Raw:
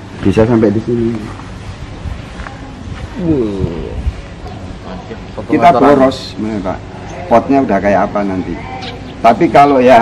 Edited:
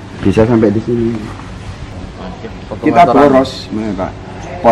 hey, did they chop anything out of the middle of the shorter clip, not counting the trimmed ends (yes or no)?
yes